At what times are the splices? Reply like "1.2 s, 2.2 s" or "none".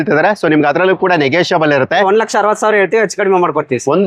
2.0 s